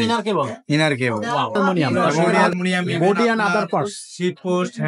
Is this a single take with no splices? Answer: no; 1 cut; at 2.5 s

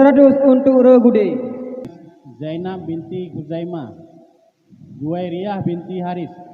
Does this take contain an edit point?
yes; 1 cut; at 1.9 s

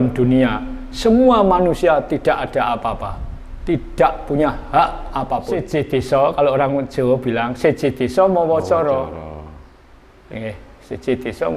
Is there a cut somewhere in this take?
yes; 1 cut; at 5.7 s

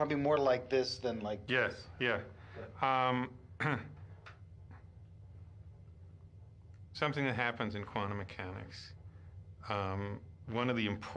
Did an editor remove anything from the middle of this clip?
yes; 1 cut; at 3.0 s

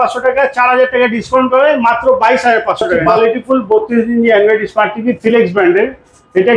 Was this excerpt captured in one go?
no; 1 cut; at 3.1 s

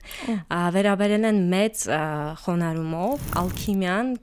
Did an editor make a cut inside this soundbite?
yes; 1 cut; at 3.3 s

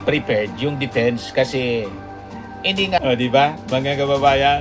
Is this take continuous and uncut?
no; 1 cut; at 3.0 s

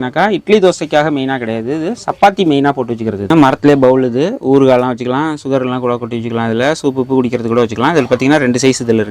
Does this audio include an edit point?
yes; 1 cut; at 3.1 s

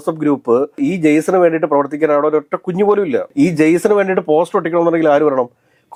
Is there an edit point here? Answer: no; 0 cuts

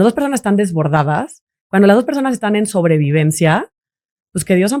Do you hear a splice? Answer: no; 0 cuts

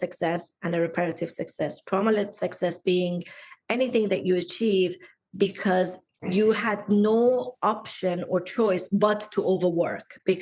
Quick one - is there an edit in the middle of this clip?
yes; 1 cut; at 6.0 s

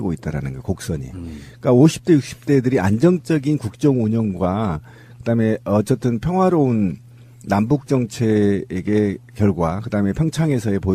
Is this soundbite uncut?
yes; 0 cuts

